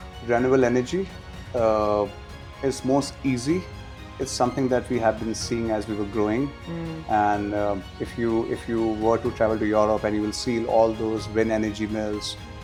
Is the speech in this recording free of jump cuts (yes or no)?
yes